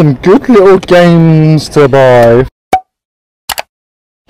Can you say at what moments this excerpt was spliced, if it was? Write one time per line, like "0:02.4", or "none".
0:02.5